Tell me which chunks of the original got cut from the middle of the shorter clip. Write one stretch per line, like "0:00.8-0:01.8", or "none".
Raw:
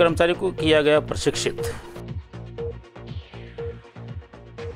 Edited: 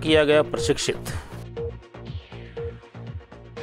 0:01.5-0:02.0